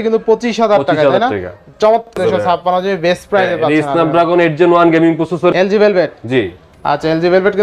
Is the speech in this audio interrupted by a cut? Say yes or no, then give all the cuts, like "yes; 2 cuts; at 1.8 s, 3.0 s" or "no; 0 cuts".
yes; 2 cuts; at 2.2 s, 5.5 s